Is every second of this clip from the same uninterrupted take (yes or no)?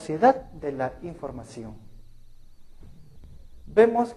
no